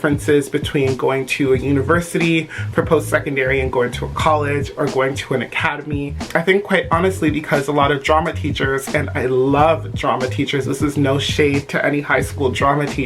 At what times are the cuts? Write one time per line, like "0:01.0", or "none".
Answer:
none